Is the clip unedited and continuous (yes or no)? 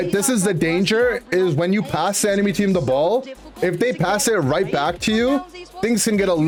yes